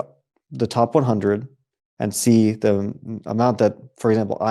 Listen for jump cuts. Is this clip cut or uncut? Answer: uncut